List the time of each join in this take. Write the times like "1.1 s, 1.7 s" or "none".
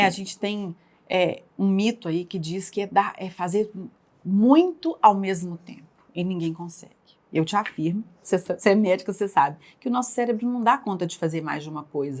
none